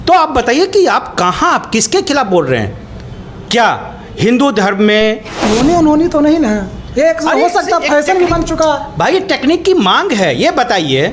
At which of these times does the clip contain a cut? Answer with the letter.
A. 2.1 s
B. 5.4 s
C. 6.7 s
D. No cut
B